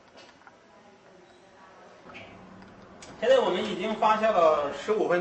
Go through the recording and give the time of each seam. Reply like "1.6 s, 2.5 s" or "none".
2.0 s